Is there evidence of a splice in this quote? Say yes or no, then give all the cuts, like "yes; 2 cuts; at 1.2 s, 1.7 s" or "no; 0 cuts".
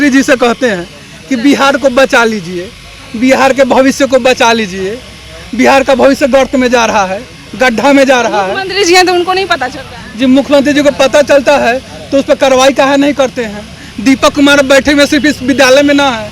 no; 0 cuts